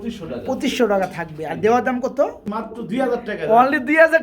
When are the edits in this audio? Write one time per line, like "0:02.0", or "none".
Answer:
0:02.2